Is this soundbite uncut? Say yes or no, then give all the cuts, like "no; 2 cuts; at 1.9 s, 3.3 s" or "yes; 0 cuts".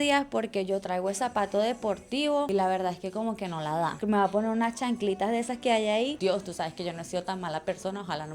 no; 2 cuts; at 4.0 s, 6.2 s